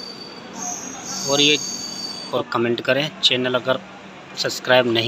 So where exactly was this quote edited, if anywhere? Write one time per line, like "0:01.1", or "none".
0:02.3